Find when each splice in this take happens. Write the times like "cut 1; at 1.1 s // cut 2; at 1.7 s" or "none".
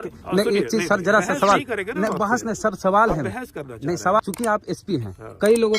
cut 1; at 4.2 s